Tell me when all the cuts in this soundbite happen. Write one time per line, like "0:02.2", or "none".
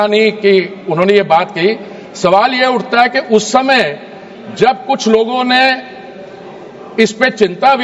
none